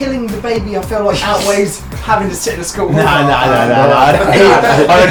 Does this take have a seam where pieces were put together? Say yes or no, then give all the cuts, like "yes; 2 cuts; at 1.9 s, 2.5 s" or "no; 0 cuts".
no; 0 cuts